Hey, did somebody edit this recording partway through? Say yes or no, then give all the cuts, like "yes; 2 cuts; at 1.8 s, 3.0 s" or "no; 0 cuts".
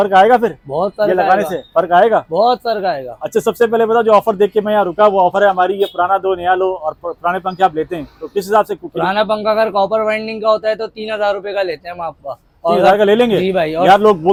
no; 0 cuts